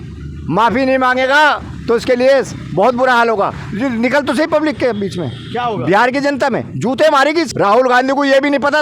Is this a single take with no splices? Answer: no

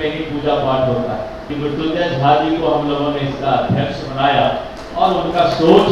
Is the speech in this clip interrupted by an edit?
yes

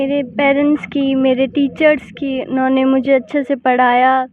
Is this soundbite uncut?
yes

